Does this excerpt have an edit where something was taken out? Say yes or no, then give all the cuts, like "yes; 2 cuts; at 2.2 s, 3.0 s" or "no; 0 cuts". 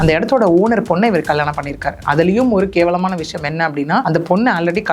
yes; 1 cut; at 4.0 s